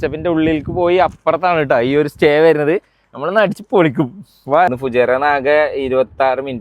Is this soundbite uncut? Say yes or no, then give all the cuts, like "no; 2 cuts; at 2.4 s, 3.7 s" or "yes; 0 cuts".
no; 1 cut; at 4.8 s